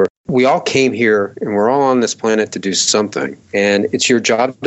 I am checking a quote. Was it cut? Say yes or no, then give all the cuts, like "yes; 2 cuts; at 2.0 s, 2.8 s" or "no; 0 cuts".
yes; 1 cut; at 3.4 s